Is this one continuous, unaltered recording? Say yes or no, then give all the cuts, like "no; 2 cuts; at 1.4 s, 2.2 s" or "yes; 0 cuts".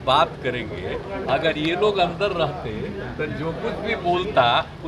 yes; 0 cuts